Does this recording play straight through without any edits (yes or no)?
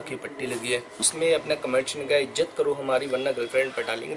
no